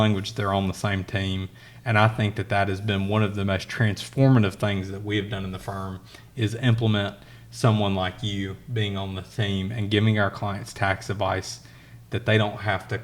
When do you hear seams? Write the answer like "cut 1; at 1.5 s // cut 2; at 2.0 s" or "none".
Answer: none